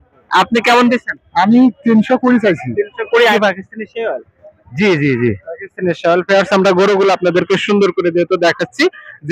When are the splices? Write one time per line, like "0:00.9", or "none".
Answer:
0:03.3